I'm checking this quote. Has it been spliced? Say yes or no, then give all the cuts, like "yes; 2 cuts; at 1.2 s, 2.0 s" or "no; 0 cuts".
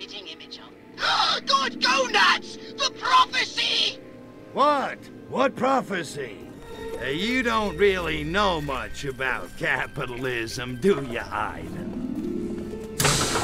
yes; 1 cut; at 6.4 s